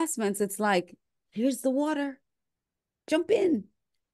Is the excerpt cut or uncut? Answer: uncut